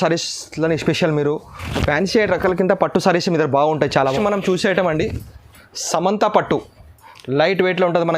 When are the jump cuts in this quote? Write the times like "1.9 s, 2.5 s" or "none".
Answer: 4.0 s